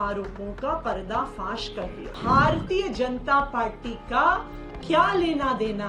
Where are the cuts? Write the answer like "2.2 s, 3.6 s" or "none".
2.1 s